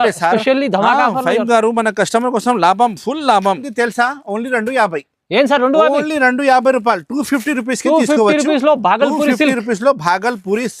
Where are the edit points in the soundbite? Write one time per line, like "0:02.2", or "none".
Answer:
0:03.7